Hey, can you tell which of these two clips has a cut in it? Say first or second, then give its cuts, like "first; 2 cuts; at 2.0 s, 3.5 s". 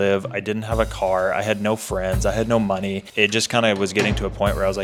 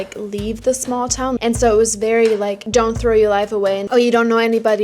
second; 2 cuts; at 1.4 s, 2.6 s